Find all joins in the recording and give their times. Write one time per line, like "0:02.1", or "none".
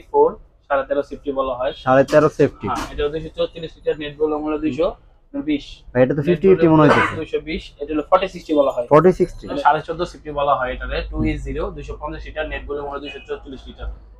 0:09.6